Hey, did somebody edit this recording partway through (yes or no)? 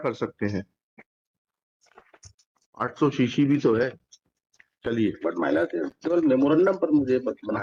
no